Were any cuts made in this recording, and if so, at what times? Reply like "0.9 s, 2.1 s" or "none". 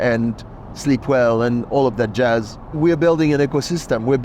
2.8 s

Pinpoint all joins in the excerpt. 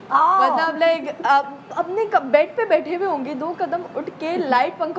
none

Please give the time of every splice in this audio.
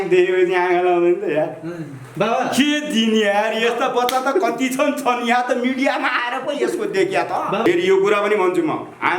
7.7 s

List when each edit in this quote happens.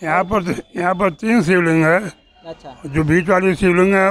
none

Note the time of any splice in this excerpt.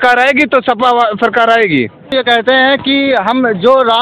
2.1 s

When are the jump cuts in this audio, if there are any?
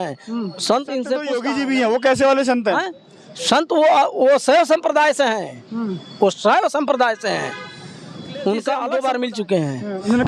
1.3 s, 8.8 s

